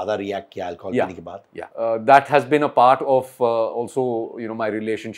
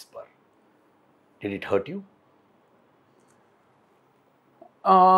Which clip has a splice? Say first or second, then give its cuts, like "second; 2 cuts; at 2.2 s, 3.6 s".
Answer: first; 1 cut; at 1.6 s